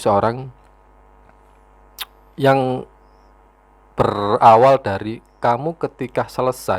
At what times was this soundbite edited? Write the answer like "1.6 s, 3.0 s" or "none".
none